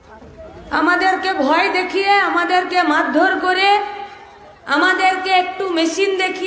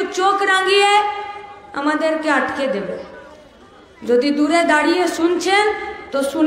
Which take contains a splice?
first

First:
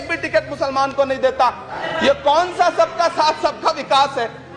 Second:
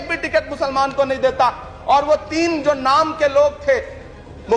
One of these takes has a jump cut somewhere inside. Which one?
first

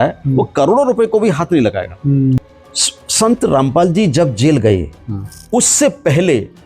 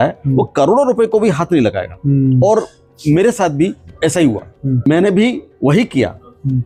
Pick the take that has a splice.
first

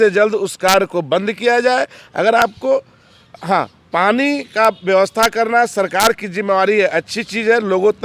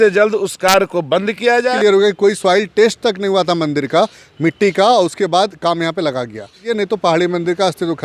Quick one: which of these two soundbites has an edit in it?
second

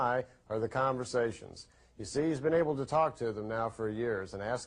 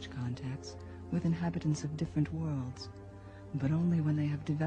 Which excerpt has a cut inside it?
first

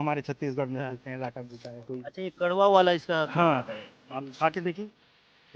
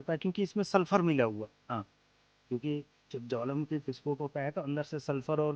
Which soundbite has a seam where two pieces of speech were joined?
first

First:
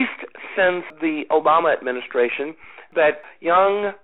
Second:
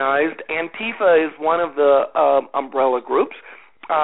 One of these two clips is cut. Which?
first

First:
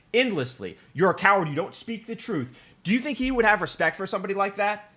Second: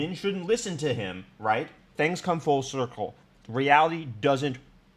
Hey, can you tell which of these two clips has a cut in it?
second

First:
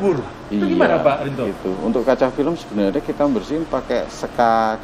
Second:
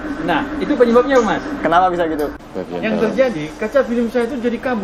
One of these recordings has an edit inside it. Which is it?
second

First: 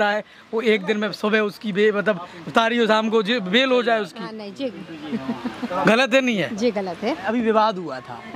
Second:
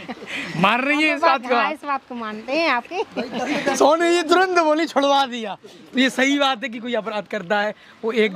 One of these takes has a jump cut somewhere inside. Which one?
first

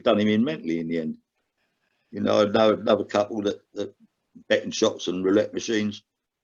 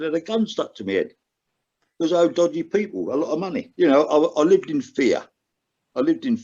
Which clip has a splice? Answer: second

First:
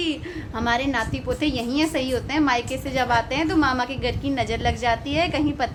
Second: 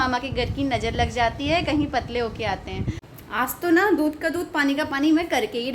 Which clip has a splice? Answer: second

